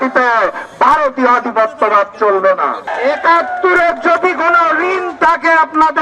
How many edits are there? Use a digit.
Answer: 1